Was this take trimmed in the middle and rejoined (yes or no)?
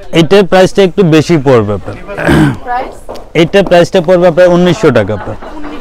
no